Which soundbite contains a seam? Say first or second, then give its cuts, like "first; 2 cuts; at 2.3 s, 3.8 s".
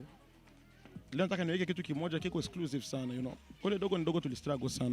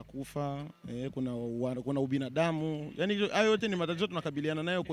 first; 1 cut; at 3.5 s